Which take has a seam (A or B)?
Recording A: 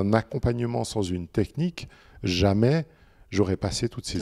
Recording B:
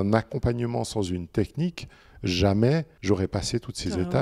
B